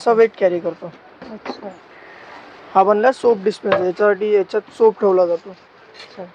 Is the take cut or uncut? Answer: uncut